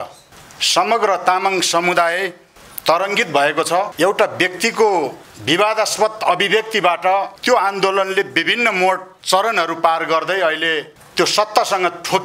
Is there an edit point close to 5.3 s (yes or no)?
yes